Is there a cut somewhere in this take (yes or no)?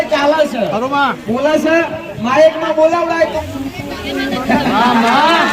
yes